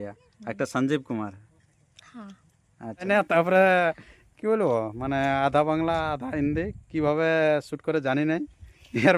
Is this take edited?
yes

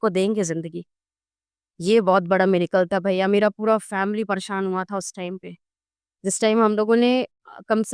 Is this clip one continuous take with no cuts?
yes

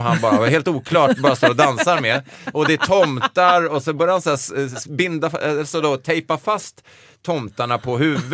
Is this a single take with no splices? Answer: yes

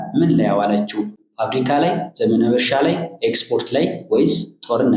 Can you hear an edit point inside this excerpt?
no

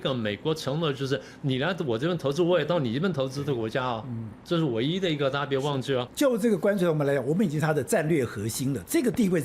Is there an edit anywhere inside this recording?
yes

